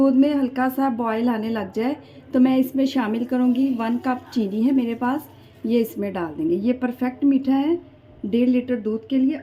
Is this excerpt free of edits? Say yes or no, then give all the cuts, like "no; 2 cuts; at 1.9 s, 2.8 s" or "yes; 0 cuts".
yes; 0 cuts